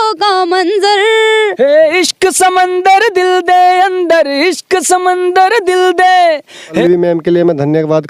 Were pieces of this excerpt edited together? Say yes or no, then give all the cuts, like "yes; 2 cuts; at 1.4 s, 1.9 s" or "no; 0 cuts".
yes; 1 cut; at 6.8 s